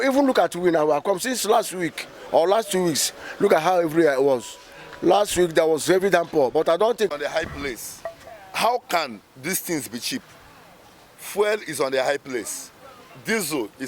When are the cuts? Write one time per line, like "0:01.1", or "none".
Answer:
0:07.1